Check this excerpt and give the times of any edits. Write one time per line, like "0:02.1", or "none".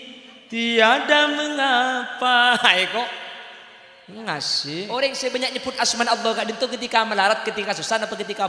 0:04.9